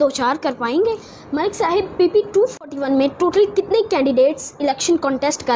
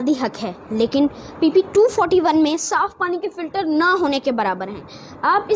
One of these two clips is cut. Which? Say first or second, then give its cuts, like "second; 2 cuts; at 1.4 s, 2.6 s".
first; 1 cut; at 1.1 s